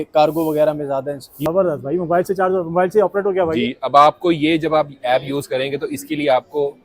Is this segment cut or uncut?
cut